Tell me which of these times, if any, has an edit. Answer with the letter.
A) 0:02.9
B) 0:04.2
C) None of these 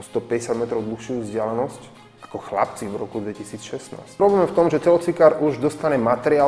B